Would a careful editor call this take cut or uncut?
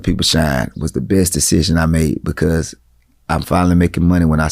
uncut